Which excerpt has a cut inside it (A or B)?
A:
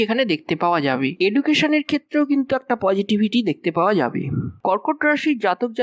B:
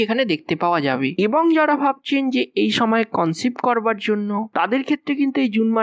A